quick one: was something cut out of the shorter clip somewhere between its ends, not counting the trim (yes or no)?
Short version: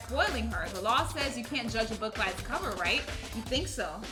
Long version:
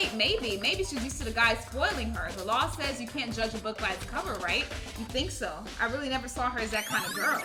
no